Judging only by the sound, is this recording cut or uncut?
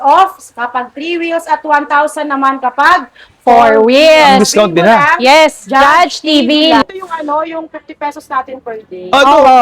cut